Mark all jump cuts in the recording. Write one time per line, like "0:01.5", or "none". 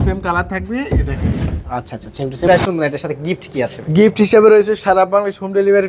0:02.4

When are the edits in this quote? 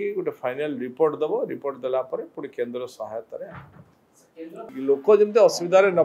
0:04.7

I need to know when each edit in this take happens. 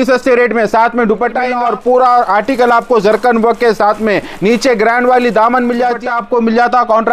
0:01.5
0:06.0

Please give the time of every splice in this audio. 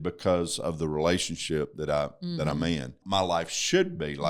0:03.0

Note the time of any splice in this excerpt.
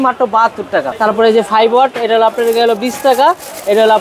0:01.0

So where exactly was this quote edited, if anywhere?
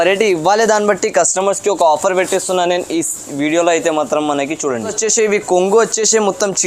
0:05.0

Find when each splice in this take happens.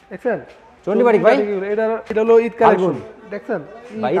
0:02.1

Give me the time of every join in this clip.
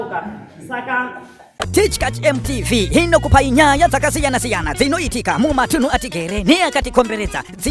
0:01.6

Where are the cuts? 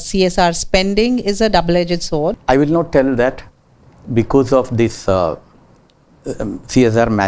0:02.4

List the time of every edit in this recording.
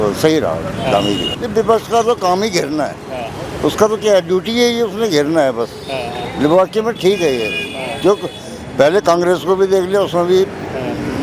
0:01.3

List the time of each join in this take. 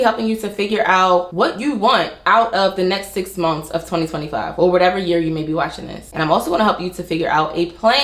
0:01.3

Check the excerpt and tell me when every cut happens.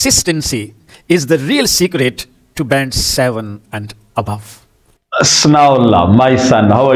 none

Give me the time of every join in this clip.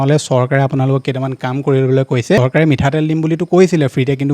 0:02.4

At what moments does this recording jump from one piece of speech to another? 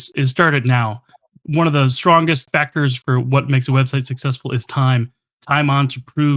0:02.5

